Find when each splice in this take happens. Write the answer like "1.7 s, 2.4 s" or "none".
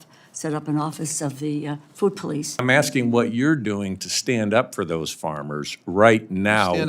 2.6 s